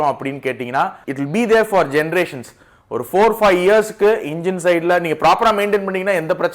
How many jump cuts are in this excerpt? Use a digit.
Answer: 1